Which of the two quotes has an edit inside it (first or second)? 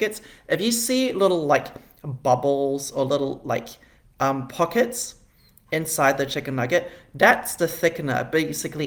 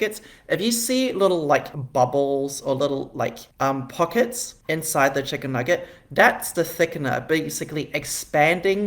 second